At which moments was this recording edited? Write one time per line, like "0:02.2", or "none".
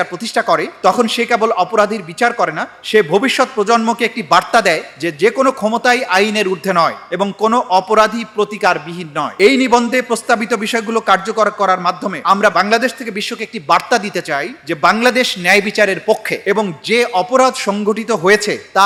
none

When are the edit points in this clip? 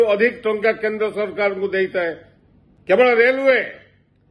0:03.0

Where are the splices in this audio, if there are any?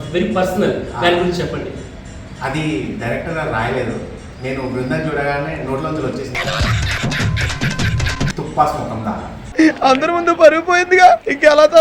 none

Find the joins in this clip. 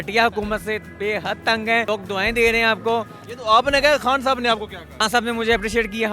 none

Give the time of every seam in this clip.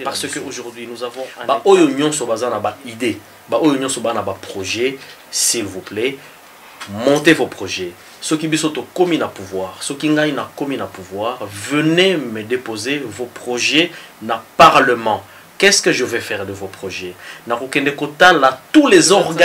0:01.4

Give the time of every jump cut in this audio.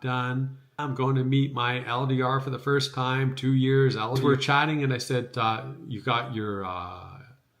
0:00.9
0:04.2

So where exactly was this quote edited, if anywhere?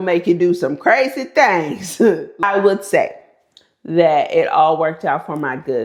none

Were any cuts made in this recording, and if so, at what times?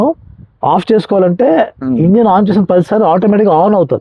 none

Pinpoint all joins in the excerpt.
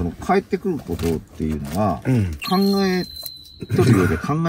0:02.4

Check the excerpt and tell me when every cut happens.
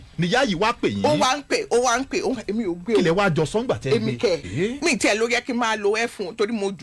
0:04.5

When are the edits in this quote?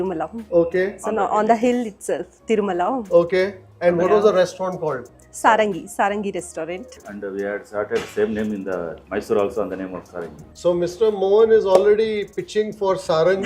none

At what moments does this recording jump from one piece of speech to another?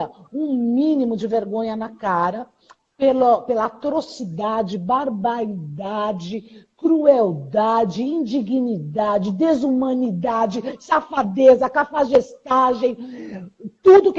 none

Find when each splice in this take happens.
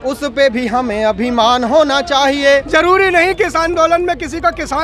0:02.5

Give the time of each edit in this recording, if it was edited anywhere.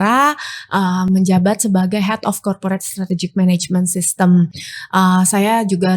none

